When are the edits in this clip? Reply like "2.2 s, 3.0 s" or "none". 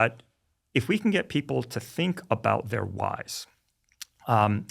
none